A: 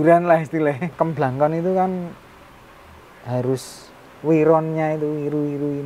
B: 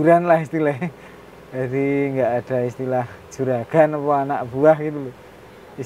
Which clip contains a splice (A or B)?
A